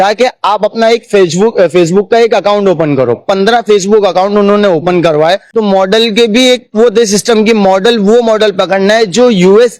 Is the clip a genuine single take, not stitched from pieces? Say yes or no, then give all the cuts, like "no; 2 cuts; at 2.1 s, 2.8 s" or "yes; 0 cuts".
no; 1 cut; at 5.5 s